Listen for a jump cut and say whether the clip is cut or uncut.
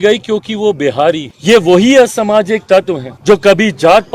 cut